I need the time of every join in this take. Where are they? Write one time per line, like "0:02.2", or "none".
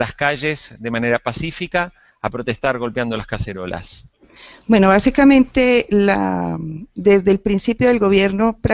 0:01.1